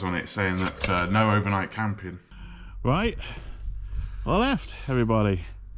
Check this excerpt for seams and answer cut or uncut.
cut